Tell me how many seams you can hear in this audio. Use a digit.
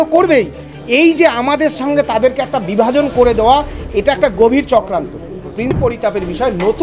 1